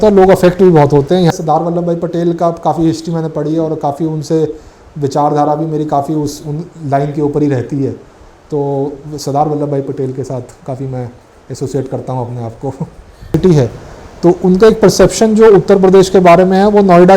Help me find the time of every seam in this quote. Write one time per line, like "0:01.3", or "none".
0:01.3
0:13.3